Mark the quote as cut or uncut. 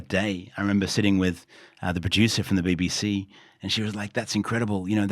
uncut